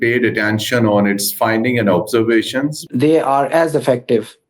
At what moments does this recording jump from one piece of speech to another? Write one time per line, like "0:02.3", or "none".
0:02.8